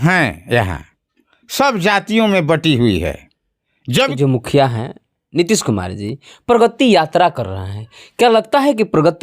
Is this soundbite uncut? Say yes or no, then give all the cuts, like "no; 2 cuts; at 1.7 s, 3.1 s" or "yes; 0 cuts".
no; 1 cut; at 4.1 s